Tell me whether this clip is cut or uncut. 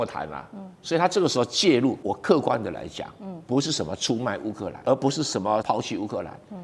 cut